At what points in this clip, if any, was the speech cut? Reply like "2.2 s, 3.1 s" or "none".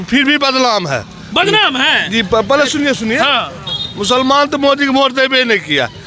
none